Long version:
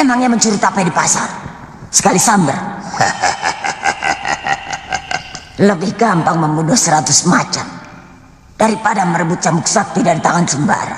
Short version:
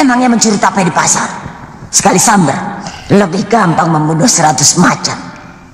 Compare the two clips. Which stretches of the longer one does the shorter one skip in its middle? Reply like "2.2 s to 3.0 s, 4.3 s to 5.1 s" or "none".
2.8 s to 5.3 s